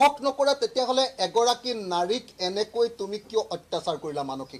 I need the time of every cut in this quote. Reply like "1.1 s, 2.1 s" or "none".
none